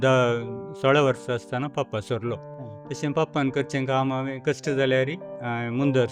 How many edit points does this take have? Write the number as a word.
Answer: zero